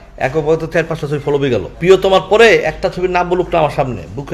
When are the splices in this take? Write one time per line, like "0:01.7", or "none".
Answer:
0:01.7